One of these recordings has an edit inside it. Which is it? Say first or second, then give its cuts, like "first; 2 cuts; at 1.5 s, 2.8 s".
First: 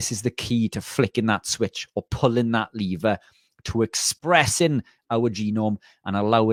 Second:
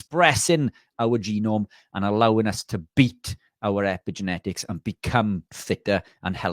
second; 1 cut; at 5.5 s